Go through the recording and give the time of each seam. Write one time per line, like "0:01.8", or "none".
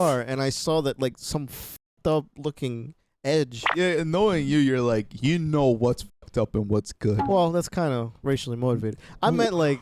0:03.6